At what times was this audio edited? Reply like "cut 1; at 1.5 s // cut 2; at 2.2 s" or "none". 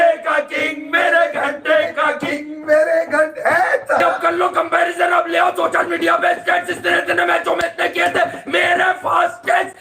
cut 1; at 4.0 s